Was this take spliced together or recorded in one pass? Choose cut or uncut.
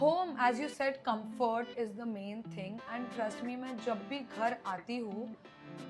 uncut